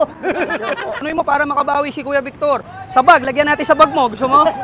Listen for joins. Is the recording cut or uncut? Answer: cut